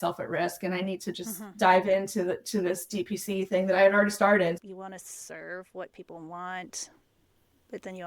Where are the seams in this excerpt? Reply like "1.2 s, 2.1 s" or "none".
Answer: 4.6 s